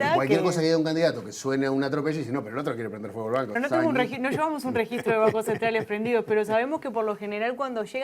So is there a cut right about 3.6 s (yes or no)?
yes